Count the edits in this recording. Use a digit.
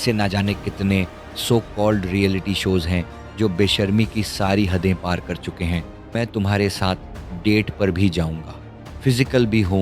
1